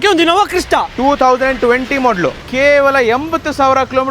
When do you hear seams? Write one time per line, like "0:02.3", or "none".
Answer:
0:02.4